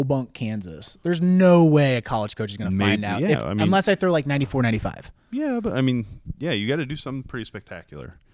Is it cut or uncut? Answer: uncut